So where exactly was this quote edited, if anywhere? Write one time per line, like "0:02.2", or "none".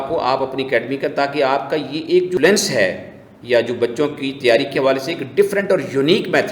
0:02.4